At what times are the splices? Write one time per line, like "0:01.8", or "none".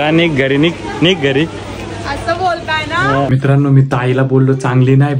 0:03.3